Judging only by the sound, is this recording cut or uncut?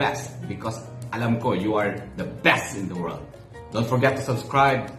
uncut